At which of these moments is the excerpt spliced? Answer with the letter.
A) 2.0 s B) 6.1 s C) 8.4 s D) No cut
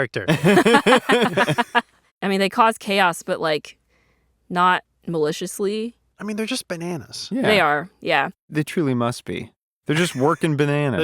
A